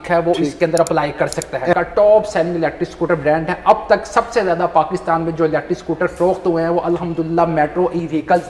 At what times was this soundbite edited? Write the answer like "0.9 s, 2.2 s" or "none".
1.7 s